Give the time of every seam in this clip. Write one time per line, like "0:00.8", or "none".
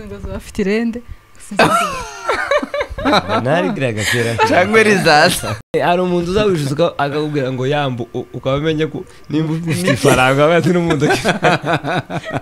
0:05.7